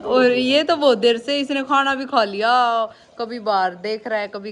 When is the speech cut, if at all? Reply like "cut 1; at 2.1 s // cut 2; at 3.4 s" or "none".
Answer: none